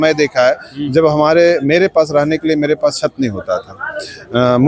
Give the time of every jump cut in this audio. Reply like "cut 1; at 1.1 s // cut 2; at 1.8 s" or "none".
none